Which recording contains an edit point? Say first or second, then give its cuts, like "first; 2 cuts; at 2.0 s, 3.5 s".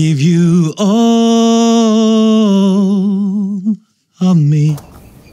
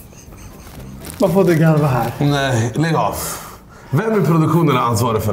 second; 1 cut; at 1.1 s